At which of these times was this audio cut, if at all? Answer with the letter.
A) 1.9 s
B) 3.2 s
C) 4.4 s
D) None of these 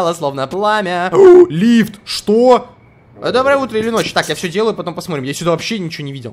D